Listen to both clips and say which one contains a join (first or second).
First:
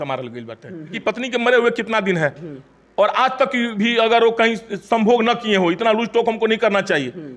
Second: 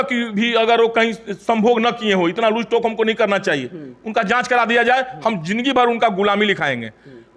first